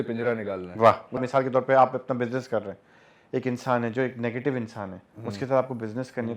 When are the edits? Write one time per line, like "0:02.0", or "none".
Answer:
0:01.2